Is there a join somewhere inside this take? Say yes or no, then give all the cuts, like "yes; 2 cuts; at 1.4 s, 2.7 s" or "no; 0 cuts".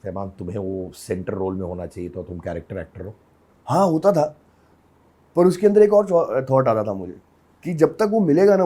no; 0 cuts